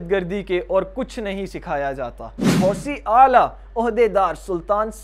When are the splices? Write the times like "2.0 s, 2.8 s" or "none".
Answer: 2.5 s